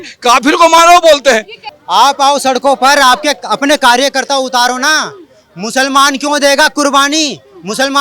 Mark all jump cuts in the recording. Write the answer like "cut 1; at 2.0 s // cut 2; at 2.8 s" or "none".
cut 1; at 1.6 s